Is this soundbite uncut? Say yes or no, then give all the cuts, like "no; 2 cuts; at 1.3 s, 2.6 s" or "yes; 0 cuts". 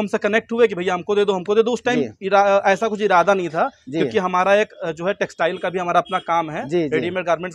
yes; 0 cuts